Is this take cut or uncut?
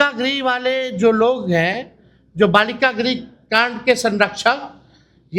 uncut